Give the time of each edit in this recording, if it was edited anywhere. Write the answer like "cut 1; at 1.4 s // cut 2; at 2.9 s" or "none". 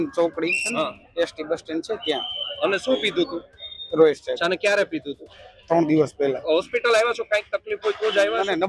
cut 1; at 4.4 s // cut 2; at 6.4 s